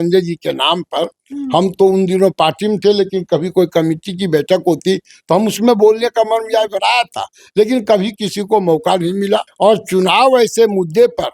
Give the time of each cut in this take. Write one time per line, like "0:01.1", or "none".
0:09.5